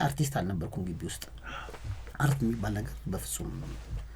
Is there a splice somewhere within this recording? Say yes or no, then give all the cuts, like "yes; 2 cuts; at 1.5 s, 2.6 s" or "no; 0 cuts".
no; 0 cuts